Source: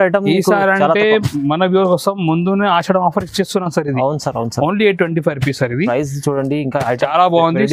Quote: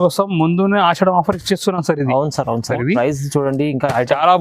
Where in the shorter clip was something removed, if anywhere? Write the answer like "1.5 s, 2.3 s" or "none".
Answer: 2.7 s